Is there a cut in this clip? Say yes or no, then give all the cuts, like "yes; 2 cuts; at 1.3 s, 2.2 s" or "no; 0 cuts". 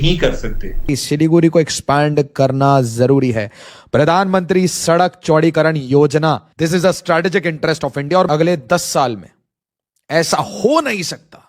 yes; 3 cuts; at 0.9 s, 6.5 s, 8.3 s